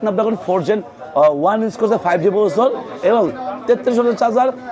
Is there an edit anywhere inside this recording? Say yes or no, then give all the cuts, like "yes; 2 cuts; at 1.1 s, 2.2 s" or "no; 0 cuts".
no; 0 cuts